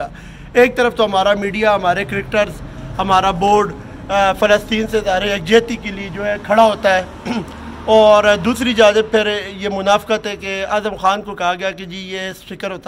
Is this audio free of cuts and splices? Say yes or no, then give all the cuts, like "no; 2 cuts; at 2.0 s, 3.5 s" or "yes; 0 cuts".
yes; 0 cuts